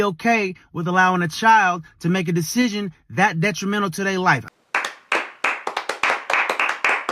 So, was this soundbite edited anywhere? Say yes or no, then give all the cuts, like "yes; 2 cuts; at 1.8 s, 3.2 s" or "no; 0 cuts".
yes; 1 cut; at 4.5 s